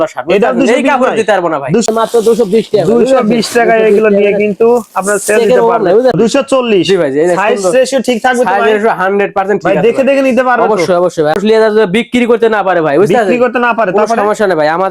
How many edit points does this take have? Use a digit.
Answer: 3